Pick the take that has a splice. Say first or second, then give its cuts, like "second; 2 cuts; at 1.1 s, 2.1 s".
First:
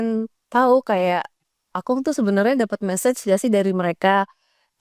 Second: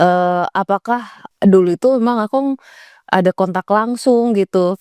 second; 1 cut; at 1.3 s